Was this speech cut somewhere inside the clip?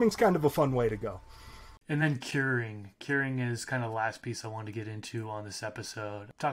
no; 0 cuts

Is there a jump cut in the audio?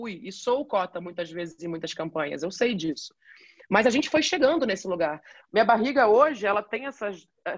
yes; 1 cut; at 5.2 s

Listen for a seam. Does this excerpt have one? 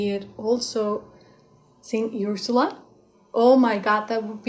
no; 0 cuts

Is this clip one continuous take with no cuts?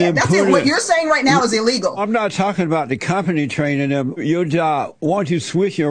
no; 2 cuts; at 2.0 s, 4.2 s

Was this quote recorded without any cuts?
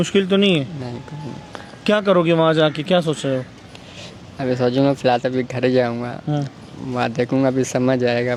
yes; 0 cuts

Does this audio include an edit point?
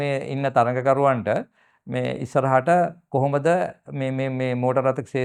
no; 0 cuts

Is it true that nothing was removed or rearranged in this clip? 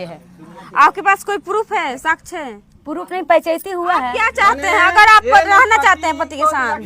no; 1 cut; at 4.2 s

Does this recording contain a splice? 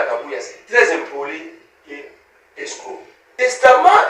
yes; 1 cut; at 3.2 s

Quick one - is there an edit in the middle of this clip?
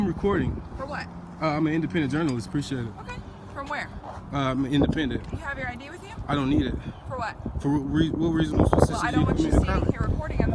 no; 0 cuts

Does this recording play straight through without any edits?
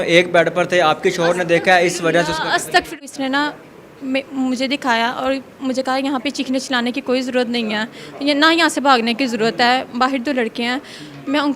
no; 1 cut; at 3.0 s

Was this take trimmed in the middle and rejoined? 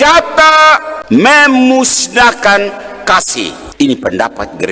yes; 2 cuts; at 0.9 s, 3.6 s

